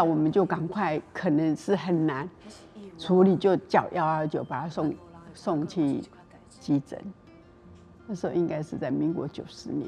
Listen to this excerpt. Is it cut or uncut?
uncut